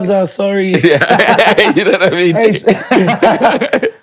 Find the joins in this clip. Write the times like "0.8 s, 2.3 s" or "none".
none

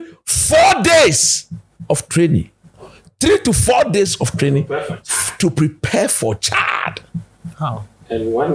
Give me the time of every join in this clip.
none

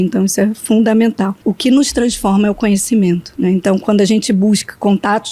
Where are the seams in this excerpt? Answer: 1.4 s, 3.3 s

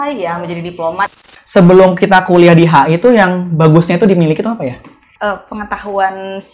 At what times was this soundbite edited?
1.3 s, 5.0 s

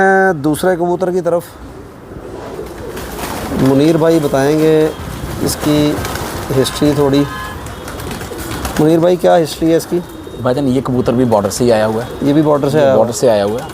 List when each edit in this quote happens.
2.5 s

